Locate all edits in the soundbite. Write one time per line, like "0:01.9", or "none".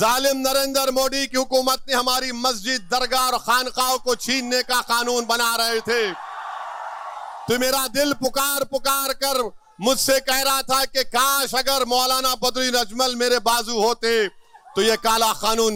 none